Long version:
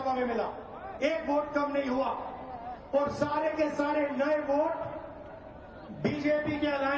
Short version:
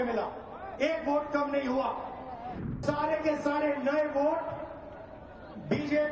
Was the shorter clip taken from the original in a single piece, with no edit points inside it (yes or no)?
no